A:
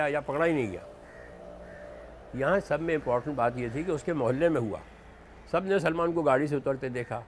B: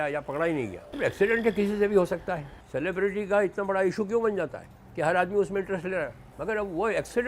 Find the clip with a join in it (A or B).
B